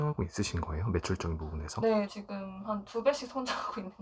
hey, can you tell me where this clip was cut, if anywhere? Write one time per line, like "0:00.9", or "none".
0:02.1